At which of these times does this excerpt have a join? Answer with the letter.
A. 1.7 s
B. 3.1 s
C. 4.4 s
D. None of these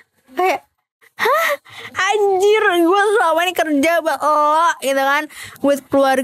A